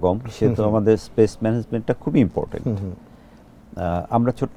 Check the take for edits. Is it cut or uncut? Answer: uncut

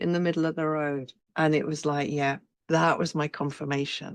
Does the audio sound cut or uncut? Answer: cut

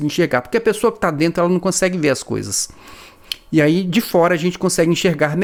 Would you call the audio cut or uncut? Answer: uncut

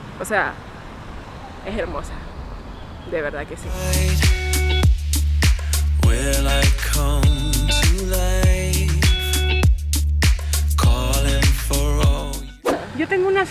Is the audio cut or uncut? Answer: cut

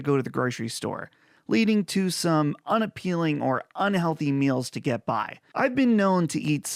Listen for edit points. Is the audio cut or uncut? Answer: uncut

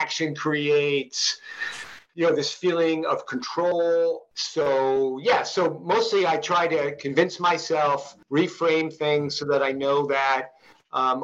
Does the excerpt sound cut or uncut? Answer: cut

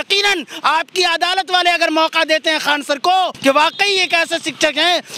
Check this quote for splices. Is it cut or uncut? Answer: cut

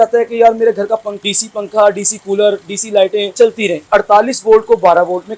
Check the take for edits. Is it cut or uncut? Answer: cut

